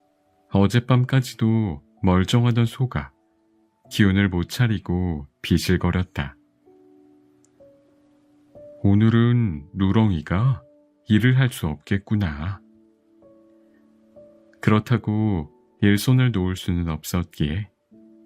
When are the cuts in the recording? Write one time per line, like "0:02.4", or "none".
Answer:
0:06.3
0:08.2